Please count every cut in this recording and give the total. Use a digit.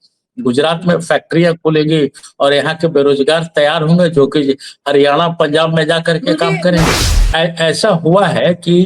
1